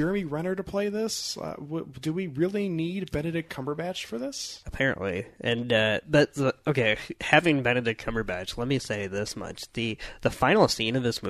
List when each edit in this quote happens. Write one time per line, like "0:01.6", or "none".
none